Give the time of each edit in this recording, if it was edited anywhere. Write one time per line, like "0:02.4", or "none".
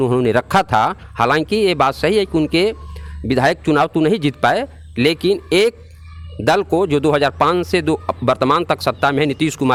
none